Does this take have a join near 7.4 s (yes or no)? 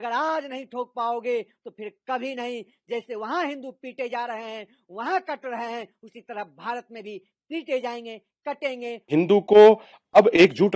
no